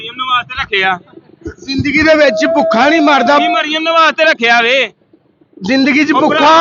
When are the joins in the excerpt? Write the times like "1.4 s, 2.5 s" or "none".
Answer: none